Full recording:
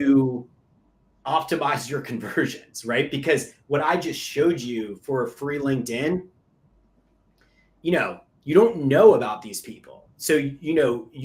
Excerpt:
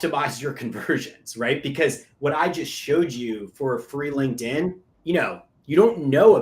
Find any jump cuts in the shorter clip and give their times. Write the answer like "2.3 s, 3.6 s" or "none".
4.9 s